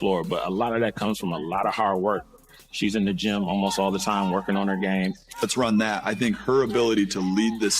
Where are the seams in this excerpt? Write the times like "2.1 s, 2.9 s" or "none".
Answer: 5.4 s

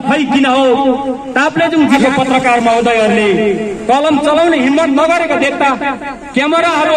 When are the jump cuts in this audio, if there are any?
2.0 s

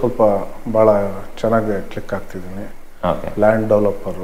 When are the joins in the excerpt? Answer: none

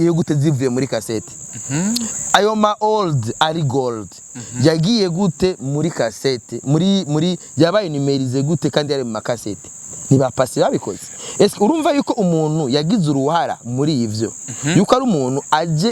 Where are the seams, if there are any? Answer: none

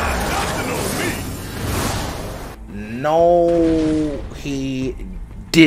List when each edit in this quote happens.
2.5 s

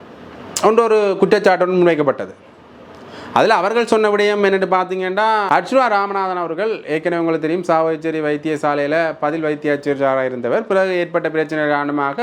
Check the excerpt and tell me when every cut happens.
5.4 s

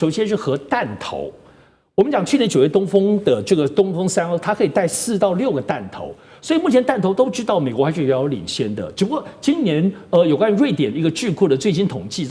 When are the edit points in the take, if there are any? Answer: none

